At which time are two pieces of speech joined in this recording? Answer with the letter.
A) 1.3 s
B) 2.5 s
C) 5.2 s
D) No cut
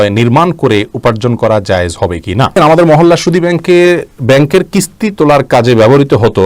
B